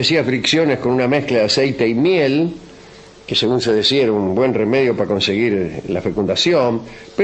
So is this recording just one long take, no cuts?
no; 1 cut; at 2.5 s

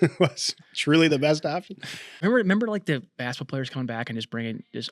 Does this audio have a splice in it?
yes; 1 cut; at 2.2 s

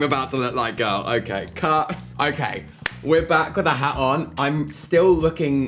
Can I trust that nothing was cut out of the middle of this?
yes; 0 cuts

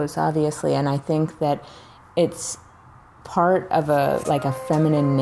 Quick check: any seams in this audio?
no; 0 cuts

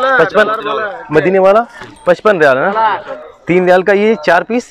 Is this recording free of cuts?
no; 1 cut; at 3.0 s

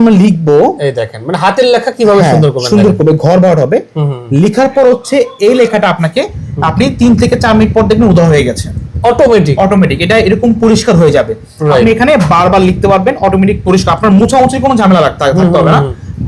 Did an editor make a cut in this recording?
no; 0 cuts

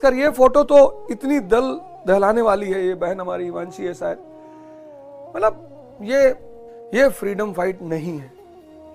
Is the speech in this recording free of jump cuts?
yes; 0 cuts

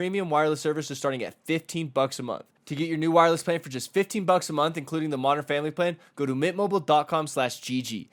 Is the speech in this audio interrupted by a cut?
no; 0 cuts

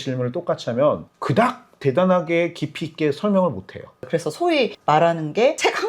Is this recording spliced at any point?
yes; 1 cut; at 4.0 s

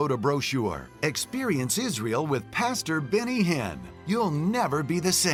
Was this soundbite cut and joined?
no; 0 cuts

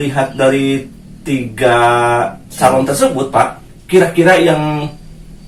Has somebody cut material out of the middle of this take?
no; 0 cuts

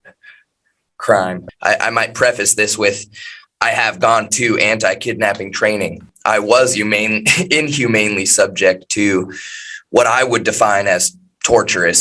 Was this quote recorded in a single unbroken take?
no; 2 cuts; at 1.5 s, 6.1 s

